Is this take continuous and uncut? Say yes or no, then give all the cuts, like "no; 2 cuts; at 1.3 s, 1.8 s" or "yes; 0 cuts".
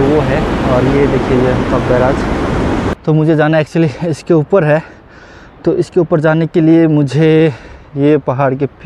no; 1 cut; at 2.9 s